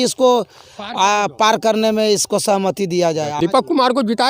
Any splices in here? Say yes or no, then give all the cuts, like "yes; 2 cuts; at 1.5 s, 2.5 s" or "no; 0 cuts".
yes; 1 cut; at 3.3 s